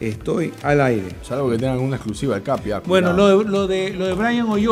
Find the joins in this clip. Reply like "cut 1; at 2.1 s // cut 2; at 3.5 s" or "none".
none